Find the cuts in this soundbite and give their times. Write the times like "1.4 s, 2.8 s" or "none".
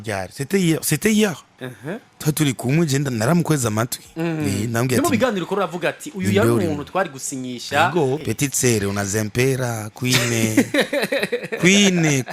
8.2 s